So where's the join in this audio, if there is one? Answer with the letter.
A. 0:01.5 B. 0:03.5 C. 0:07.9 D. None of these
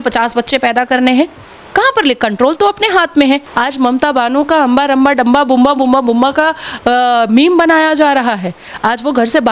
B